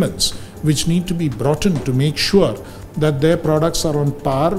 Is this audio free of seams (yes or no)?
yes